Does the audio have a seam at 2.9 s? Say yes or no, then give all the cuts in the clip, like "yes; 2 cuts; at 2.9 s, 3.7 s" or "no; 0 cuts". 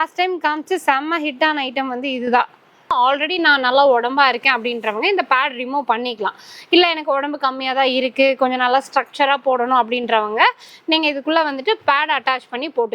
yes; 1 cut; at 2.9 s